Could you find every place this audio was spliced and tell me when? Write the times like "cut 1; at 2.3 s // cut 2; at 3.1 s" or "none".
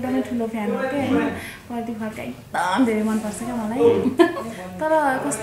none